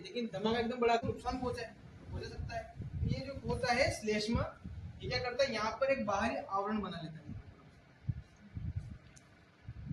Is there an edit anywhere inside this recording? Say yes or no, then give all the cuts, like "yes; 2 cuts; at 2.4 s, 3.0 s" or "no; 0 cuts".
yes; 1 cut; at 1.0 s